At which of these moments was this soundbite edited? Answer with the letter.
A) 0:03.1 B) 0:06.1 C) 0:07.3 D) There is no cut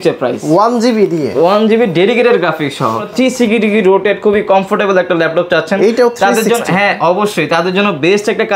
A